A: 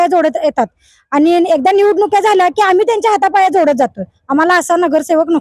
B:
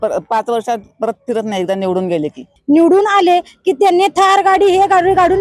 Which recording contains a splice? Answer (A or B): B